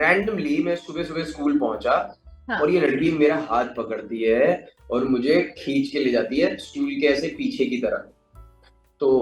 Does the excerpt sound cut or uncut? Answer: uncut